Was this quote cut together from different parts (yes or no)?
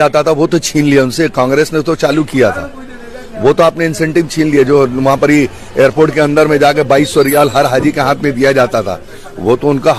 no